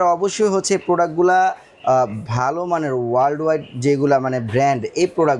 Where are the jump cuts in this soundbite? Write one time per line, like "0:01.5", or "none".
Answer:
none